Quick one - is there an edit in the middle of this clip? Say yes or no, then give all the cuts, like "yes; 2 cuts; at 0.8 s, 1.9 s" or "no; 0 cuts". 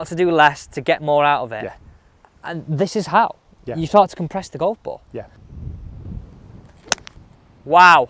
no; 0 cuts